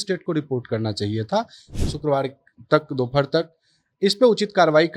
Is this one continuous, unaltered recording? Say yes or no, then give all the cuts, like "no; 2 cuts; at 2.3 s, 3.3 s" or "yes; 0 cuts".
no; 1 cut; at 1.7 s